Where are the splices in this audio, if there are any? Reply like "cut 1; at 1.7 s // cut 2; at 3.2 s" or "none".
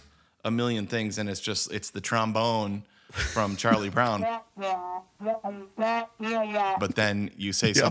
none